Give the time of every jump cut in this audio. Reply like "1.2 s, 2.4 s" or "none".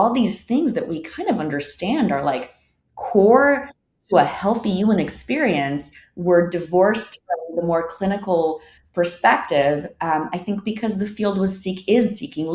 none